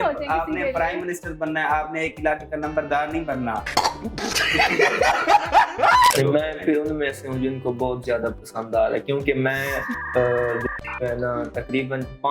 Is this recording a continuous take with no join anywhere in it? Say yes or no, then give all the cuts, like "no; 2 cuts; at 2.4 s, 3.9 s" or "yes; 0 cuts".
no; 1 cut; at 6.1 s